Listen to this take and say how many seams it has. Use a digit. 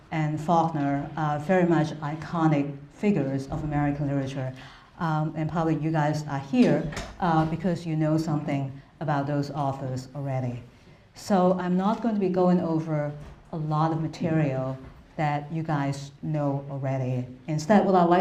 0